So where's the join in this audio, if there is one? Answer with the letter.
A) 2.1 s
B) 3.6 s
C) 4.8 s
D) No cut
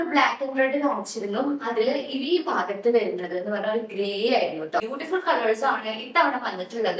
C